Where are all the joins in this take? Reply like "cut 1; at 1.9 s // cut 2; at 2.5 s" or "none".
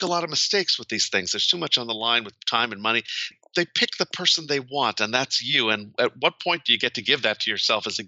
cut 1; at 3.3 s